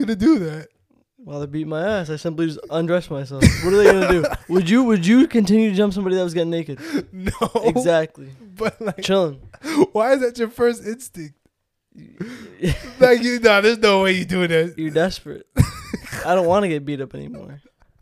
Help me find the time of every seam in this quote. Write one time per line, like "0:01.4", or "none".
none